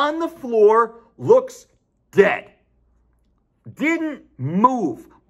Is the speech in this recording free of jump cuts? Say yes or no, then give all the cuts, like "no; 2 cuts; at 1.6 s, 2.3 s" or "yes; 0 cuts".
yes; 0 cuts